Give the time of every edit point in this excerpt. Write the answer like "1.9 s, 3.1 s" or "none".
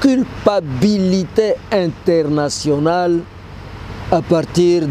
none